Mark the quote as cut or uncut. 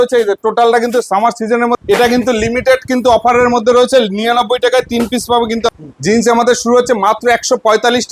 cut